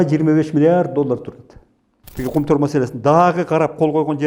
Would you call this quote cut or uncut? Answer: cut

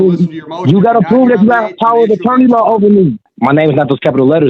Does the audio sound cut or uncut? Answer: cut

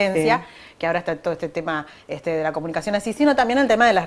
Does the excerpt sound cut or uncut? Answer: uncut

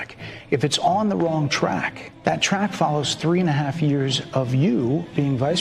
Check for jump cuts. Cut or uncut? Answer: cut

